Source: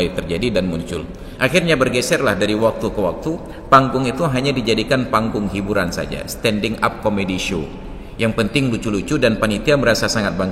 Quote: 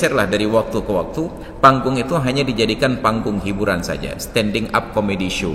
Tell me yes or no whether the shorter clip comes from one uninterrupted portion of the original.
yes